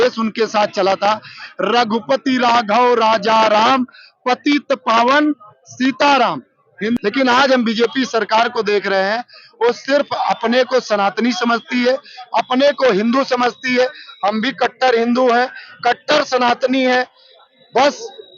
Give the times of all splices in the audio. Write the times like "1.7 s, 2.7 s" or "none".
7.0 s